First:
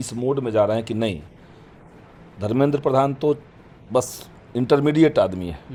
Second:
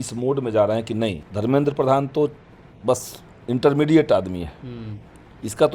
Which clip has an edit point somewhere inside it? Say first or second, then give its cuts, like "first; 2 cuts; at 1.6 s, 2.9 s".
second; 1 cut; at 1.2 s